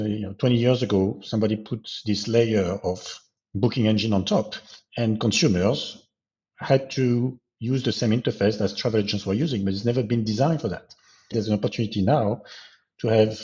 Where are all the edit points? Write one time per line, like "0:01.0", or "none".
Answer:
0:11.3